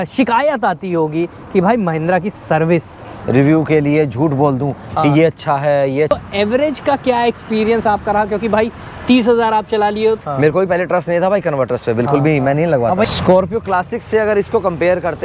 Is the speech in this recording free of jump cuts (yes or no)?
no